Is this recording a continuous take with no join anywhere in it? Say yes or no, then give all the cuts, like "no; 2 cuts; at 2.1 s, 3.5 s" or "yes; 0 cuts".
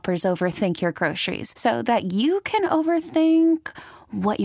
yes; 0 cuts